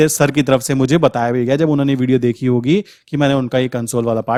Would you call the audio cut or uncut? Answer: uncut